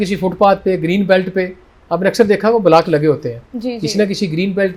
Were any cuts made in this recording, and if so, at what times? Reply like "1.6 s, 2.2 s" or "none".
none